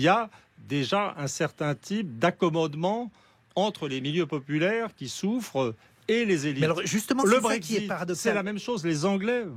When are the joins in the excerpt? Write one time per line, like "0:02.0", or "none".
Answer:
none